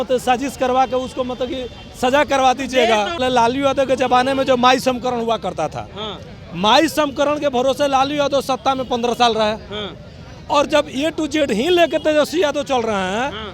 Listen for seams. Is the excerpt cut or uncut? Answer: cut